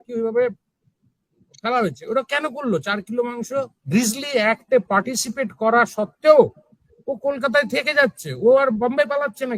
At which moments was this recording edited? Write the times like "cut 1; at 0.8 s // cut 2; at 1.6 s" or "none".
cut 1; at 3.8 s